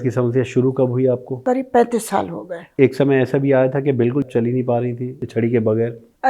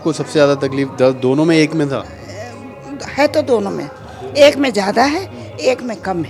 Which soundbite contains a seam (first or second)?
first